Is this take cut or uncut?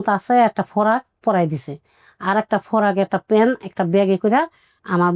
uncut